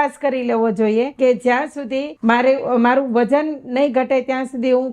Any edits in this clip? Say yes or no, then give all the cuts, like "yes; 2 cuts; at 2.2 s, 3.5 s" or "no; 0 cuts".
yes; 2 cuts; at 1.1 s, 2.1 s